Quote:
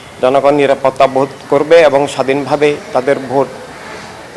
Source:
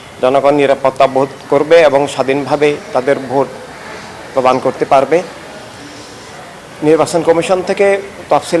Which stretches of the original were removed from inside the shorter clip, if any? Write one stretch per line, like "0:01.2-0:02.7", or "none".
none